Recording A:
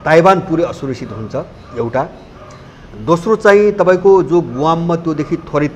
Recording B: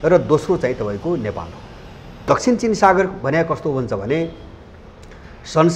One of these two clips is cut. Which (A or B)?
B